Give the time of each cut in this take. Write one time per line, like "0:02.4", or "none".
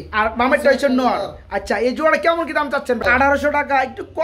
0:03.0